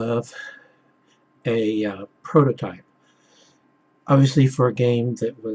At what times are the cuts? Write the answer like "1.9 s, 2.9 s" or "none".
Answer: 2.4 s